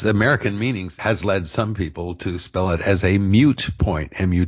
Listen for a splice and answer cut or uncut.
cut